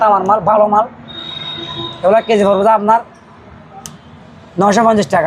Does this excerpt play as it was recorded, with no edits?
yes; 0 cuts

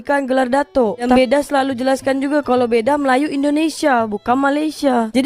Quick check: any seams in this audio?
yes; 1 cut; at 1.1 s

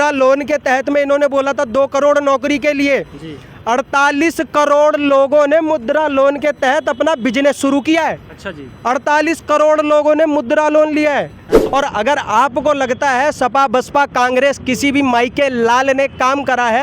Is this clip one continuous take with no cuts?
no; 1 cut; at 11.6 s

